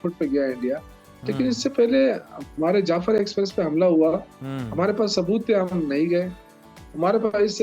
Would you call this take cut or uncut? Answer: uncut